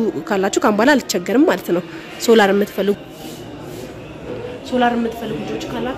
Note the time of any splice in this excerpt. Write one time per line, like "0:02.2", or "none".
0:04.3